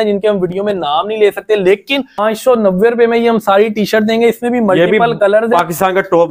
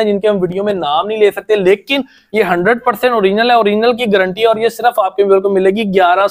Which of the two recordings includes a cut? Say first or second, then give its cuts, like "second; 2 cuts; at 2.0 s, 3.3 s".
first; 1 cut; at 2.2 s